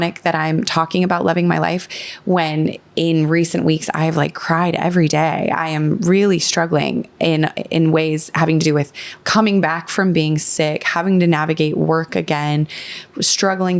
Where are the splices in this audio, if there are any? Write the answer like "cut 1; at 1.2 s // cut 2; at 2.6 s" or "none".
none